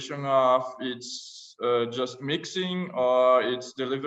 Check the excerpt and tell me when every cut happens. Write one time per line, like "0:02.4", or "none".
none